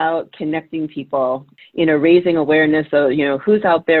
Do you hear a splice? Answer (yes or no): yes